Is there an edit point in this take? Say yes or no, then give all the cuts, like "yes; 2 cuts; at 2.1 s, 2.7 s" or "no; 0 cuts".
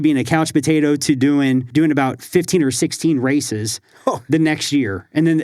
yes; 1 cut; at 1.7 s